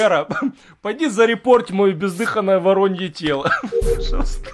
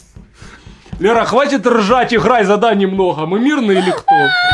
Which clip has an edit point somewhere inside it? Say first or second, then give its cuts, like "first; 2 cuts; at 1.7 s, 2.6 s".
first; 1 cut; at 3.6 s